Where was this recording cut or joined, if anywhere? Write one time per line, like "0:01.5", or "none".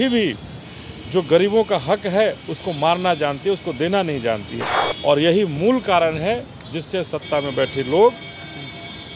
none

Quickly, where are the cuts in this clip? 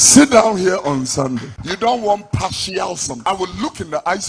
0:01.6
0:03.1

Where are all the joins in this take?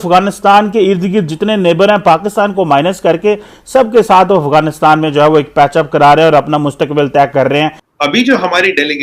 0:07.8

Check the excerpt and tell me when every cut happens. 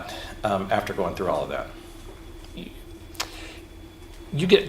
0:02.5

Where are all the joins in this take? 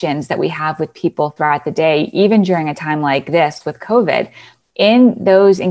0:03.3

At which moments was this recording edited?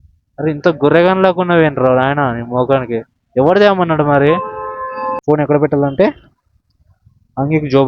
0:05.2

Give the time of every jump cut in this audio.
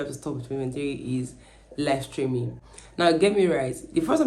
none

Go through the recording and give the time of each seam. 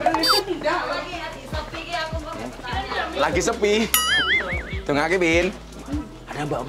none

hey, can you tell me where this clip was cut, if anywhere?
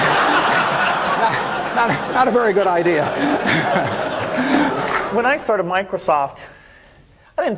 0:04.9

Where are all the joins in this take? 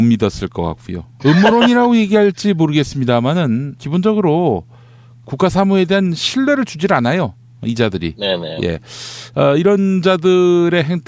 none

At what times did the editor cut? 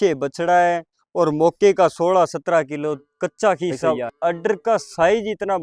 0:03.8

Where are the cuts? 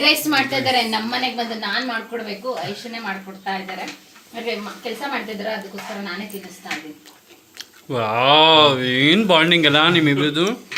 none

